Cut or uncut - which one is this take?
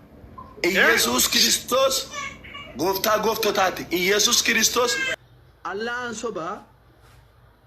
cut